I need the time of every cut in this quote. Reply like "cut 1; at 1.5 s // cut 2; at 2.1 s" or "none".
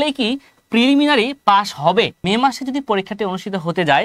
cut 1; at 2.2 s